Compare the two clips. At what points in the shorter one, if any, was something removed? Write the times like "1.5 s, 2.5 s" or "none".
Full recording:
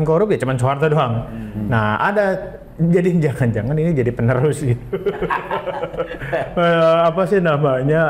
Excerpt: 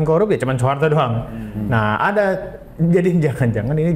none

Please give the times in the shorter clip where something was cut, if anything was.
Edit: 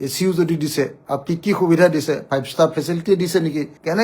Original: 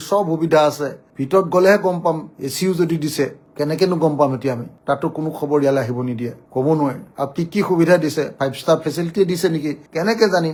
1.0 s

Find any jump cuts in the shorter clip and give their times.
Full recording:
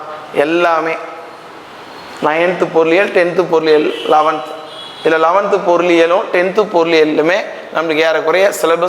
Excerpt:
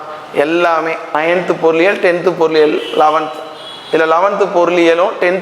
1.1 s

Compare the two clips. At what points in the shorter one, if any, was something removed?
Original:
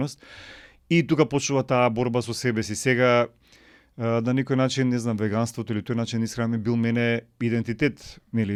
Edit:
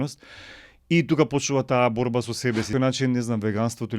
2.7 s

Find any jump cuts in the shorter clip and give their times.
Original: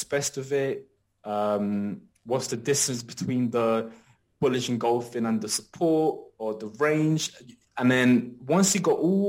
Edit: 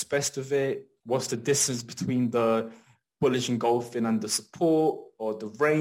0.9 s

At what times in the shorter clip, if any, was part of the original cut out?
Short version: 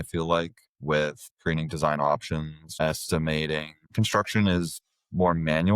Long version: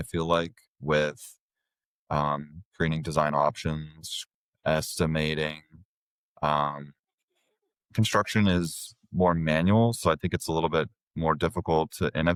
1.3 s, 2.6 s, 3.8 s

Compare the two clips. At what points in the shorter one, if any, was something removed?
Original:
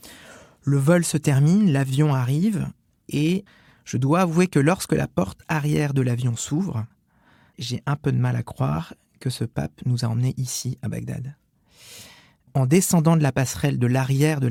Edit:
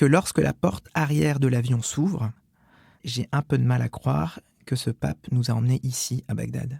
none

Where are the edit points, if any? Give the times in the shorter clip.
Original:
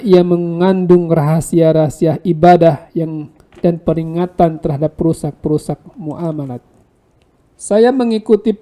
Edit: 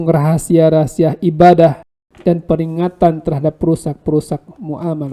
1.8 s

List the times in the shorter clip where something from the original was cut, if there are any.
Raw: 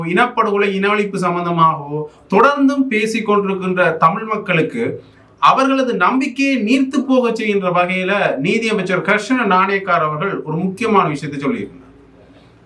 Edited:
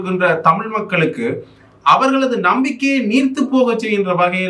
none

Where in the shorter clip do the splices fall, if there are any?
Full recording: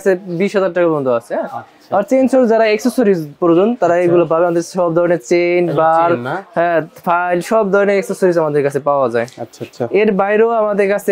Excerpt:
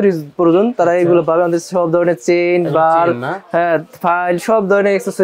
none

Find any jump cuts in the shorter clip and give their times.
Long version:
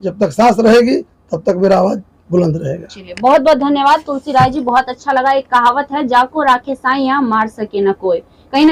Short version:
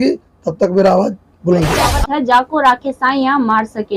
2.0 s

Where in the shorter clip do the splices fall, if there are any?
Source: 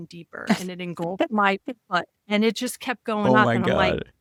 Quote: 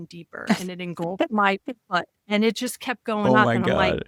none

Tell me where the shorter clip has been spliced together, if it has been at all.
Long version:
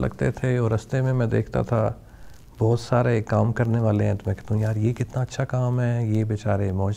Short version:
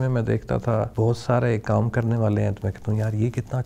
0.9 s

